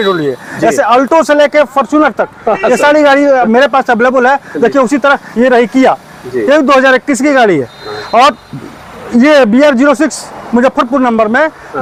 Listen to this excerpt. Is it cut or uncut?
uncut